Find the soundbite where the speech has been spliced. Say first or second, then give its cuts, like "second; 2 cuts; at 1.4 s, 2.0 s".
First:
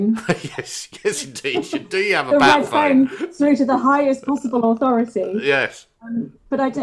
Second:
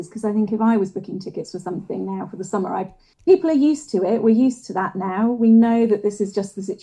second; 1 cut; at 3.0 s